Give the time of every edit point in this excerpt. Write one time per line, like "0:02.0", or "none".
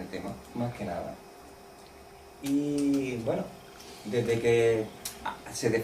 none